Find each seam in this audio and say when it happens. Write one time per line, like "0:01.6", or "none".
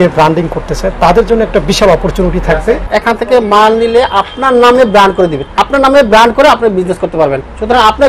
0:02.9
0:05.4